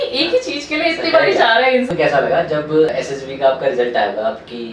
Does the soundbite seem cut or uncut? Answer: cut